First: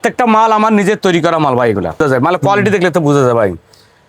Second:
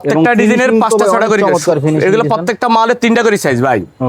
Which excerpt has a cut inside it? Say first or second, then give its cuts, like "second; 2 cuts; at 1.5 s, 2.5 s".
first; 1 cut; at 2.0 s